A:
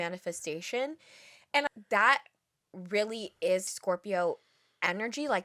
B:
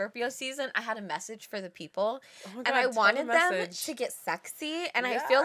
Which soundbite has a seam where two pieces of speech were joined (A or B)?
A